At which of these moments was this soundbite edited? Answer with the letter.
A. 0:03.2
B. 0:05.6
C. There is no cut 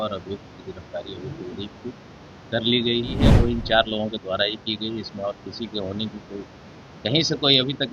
A